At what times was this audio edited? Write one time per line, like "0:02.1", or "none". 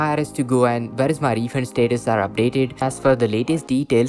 0:02.8